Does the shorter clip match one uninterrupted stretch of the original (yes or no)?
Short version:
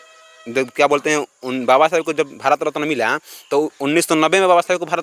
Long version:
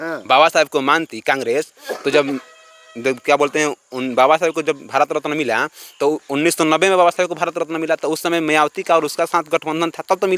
yes